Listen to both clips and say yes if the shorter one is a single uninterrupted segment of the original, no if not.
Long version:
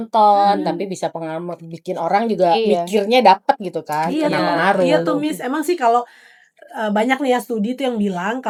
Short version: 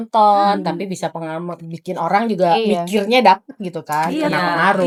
yes